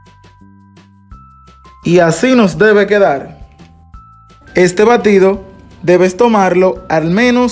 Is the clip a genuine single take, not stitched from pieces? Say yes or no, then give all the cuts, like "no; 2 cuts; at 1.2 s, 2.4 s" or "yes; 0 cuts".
no; 1 cut; at 1.8 s